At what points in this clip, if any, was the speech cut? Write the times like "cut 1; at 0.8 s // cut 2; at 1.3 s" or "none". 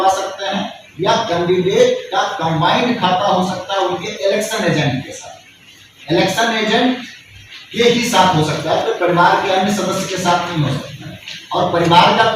none